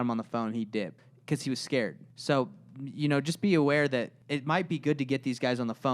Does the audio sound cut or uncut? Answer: cut